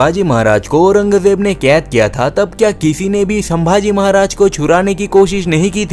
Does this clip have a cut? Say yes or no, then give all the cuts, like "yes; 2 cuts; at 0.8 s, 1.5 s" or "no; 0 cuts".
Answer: no; 0 cuts